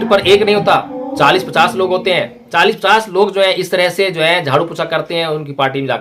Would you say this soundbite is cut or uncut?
uncut